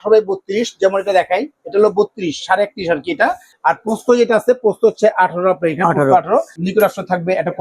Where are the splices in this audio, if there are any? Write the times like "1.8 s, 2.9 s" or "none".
3.5 s, 6.6 s